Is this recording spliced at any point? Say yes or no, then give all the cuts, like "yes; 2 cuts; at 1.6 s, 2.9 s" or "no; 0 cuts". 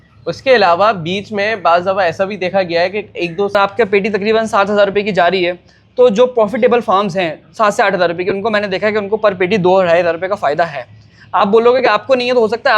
yes; 1 cut; at 3.5 s